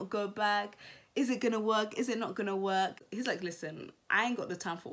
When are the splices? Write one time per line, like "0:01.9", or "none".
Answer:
0:03.1